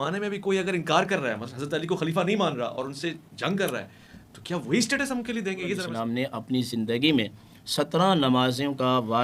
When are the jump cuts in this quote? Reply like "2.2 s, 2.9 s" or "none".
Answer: 5.9 s